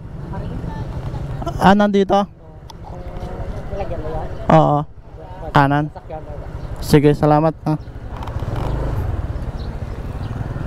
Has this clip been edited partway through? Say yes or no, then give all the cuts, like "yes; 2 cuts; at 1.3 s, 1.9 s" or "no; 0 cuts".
no; 0 cuts